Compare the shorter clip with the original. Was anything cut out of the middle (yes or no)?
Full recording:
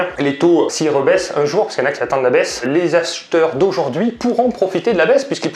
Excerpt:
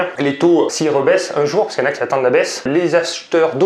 no